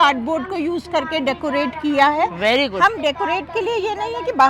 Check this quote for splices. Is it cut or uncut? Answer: uncut